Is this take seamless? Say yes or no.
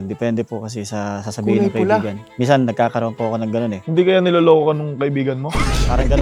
yes